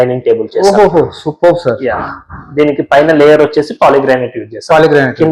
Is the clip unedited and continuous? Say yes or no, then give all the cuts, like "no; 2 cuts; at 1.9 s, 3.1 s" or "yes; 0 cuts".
yes; 0 cuts